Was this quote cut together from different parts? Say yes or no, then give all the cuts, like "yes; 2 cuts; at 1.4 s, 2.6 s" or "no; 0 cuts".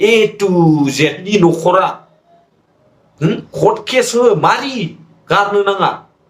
yes; 1 cut; at 1.3 s